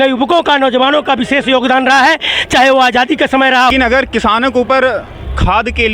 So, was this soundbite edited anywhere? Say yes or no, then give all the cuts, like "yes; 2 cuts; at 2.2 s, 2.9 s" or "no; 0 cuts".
yes; 1 cut; at 3.7 s